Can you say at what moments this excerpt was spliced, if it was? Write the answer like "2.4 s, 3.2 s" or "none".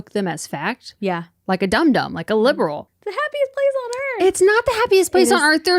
2.9 s